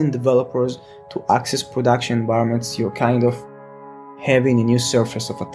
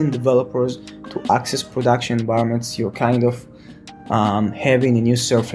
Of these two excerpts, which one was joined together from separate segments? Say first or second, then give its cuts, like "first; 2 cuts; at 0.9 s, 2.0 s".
first; 1 cut; at 4.1 s